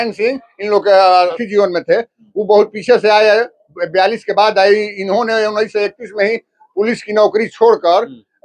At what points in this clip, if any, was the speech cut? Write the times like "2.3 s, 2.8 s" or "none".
1.4 s